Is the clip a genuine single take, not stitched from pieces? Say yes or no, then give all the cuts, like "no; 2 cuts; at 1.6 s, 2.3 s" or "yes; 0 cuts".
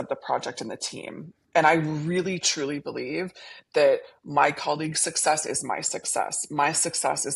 yes; 0 cuts